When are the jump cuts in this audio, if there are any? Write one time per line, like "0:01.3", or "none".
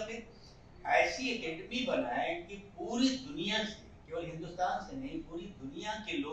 none